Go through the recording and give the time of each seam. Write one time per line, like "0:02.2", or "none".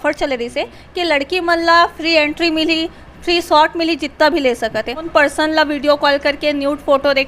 0:05.0